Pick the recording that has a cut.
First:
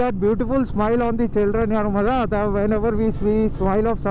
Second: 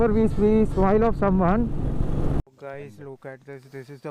second; 1 cut; at 2.4 s

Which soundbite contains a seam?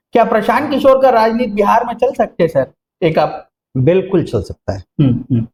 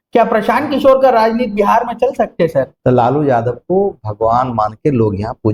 second; 1 cut; at 2.7 s

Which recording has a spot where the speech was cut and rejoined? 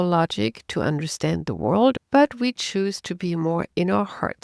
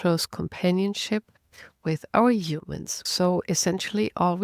second; 1 cut; at 2.9 s

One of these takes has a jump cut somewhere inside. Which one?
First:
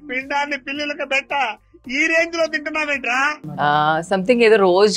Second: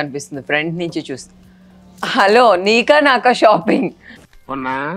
first; 1 cut; at 3.4 s

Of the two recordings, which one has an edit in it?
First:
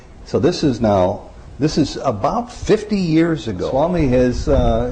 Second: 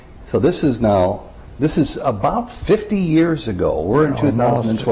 first; 1 cut; at 3.6 s

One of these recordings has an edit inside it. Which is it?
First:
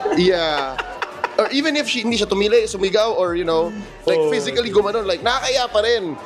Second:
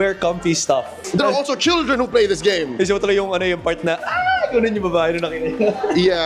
second; 1 cut; at 0.9 s

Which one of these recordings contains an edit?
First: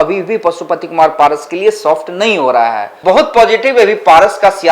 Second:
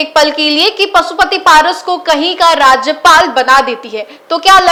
first; 1 cut; at 2.9 s

